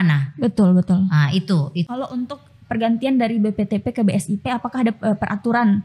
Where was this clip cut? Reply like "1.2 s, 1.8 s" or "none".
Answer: 1.9 s